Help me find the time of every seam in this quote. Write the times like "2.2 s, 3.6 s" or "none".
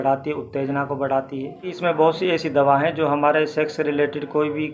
1.7 s